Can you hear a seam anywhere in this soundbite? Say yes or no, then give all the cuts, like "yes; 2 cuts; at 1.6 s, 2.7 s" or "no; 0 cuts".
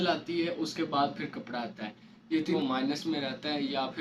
yes; 1 cut; at 2.6 s